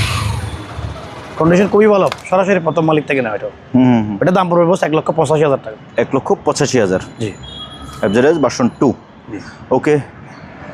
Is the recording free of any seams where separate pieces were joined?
yes; 0 cuts

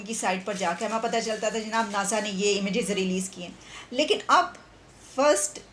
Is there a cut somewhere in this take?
no; 0 cuts

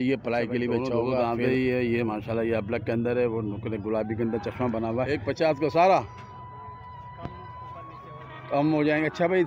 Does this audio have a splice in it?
yes; 2 cuts; at 1.4 s, 5.1 s

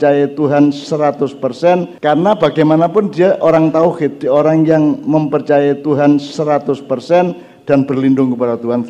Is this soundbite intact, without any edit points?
no; 2 cuts; at 1.9 s, 7.4 s

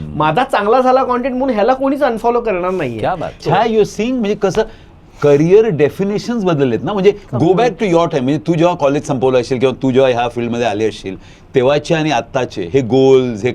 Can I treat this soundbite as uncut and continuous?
yes; 0 cuts

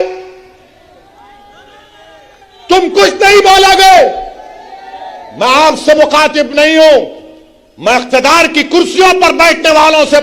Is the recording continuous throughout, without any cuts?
yes; 0 cuts

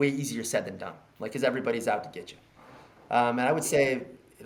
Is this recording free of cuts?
yes; 0 cuts

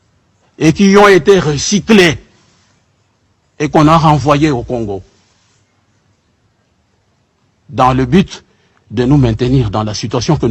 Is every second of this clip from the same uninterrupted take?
yes; 0 cuts

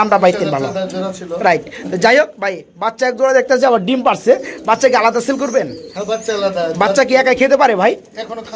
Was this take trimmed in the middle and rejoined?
no; 0 cuts

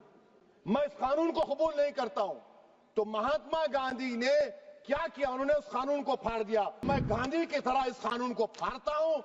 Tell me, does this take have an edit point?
yes; 1 cut; at 6.9 s

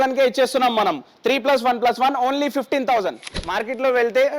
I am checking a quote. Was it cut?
yes; 1 cut; at 3.3 s

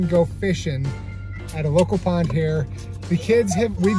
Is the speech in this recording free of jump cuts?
yes; 0 cuts

